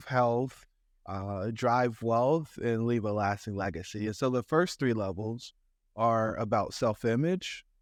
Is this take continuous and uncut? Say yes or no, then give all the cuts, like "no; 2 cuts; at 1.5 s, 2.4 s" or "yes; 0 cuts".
yes; 0 cuts